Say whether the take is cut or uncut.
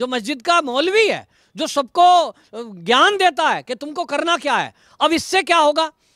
uncut